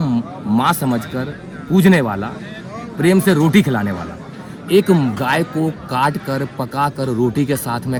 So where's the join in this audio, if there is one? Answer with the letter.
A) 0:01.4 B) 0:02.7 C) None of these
C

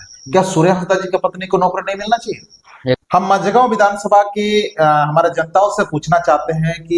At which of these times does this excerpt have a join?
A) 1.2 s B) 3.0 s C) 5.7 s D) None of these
B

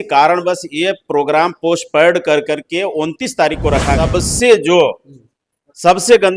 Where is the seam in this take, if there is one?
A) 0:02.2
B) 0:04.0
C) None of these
B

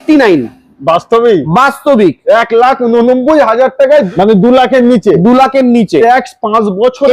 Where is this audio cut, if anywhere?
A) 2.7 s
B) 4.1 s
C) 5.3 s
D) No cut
B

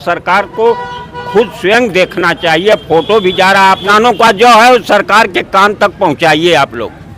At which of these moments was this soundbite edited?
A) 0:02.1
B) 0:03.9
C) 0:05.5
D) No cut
B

